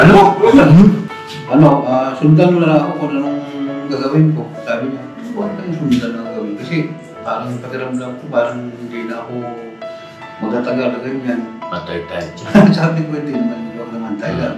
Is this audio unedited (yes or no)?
no